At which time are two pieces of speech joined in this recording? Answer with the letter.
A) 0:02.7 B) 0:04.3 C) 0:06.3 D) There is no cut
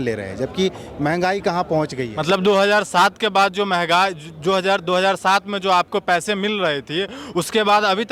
D